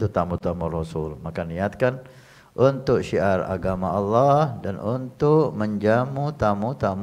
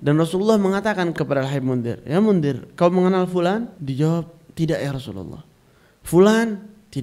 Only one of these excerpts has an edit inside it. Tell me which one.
second; 2 cuts; at 1.1 s, 3.8 s

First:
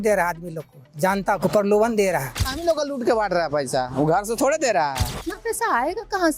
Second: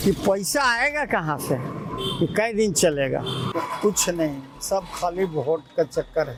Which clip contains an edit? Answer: first; 2 cuts; at 2.5 s, 5.3 s

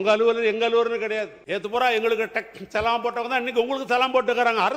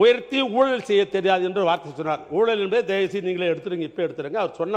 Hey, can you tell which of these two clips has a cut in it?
first; 1 cut; at 1.4 s

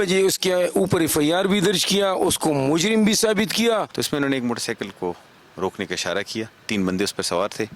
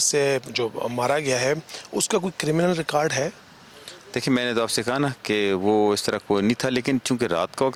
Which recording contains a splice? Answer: first; 1 cut; at 3.9 s

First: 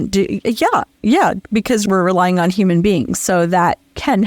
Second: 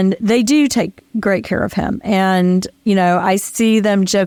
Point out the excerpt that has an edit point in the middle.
first; 1 cut; at 0.9 s

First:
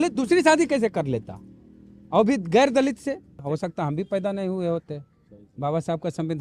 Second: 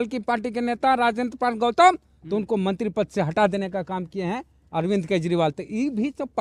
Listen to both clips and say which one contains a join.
first; 1 cut; at 3.4 s

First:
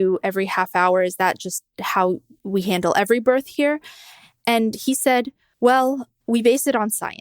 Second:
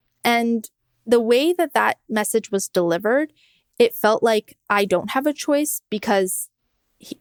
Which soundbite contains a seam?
first; 2 cuts; at 5.4 s, 6.1 s

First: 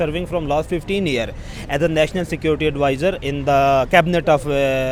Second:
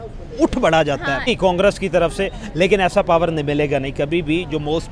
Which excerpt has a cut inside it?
second; 1 cut; at 1.3 s

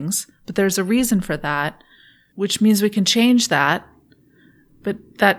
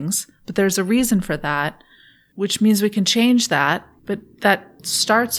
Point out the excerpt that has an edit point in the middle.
second; 1 cut; at 3.9 s

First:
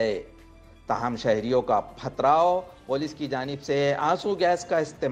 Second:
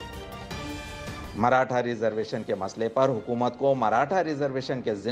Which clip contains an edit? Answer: second; 1 cut; at 1.1 s

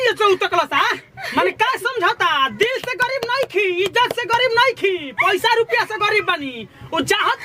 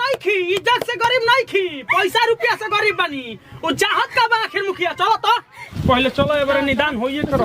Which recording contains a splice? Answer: second; 1 cut; at 5.7 s

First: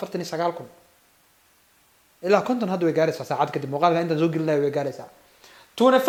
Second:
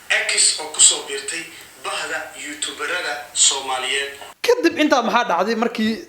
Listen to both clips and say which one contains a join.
second; 1 cut; at 4.2 s

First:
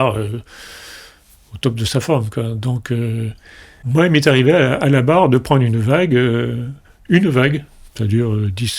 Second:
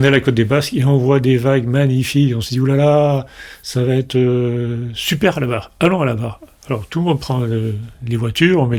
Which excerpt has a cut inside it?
first; 1 cut; at 3.8 s

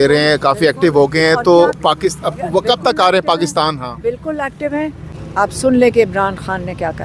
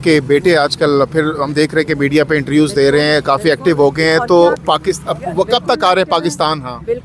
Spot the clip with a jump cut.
first; 1 cut; at 5.1 s

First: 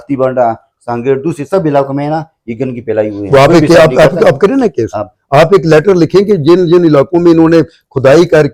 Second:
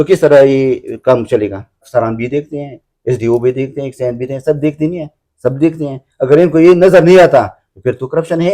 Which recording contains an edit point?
second; 1 cut; at 1.8 s

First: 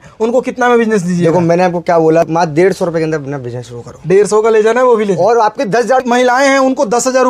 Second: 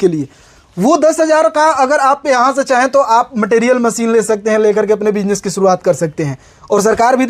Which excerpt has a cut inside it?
first; 2 cuts; at 2.3 s, 6.0 s

